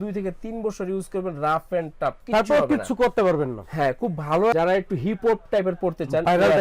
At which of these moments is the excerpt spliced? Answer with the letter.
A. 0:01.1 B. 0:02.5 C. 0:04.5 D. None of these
C